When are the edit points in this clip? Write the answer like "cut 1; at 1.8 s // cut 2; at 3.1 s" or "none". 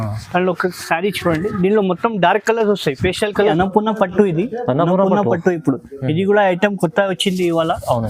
cut 1; at 3.5 s